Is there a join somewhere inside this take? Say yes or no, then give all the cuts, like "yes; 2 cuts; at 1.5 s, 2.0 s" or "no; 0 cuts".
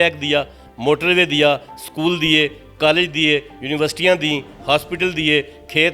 no; 0 cuts